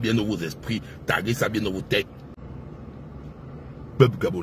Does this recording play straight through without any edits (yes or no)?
no